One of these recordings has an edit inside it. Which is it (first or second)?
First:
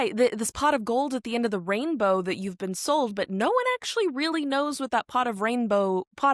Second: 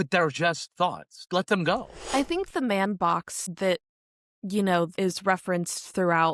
second